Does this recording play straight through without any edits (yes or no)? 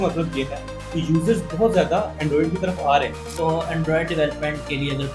no